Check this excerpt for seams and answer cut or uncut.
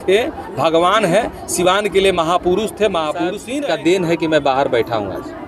cut